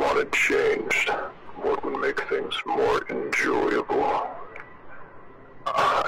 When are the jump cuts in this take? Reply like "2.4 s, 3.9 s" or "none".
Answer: 1.4 s